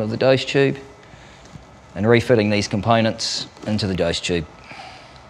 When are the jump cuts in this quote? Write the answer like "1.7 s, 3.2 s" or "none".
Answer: 4.0 s

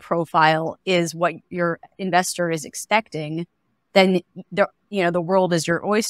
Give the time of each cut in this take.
1.5 s

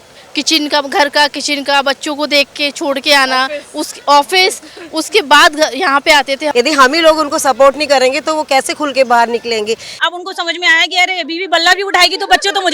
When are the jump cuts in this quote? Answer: 6.5 s, 10.0 s

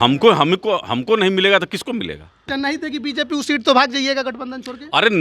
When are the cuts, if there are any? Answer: 2.5 s

